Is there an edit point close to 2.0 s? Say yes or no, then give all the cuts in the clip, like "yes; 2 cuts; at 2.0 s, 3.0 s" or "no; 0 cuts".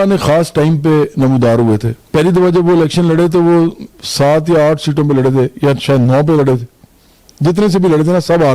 yes; 1 cut; at 2.0 s